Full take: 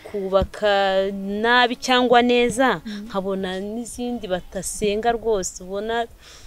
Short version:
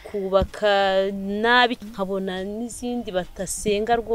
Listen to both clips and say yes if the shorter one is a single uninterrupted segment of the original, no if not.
no